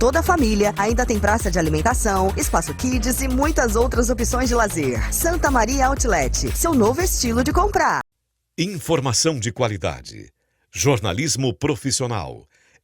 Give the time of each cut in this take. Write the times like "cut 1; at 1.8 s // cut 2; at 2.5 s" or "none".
cut 1; at 8.0 s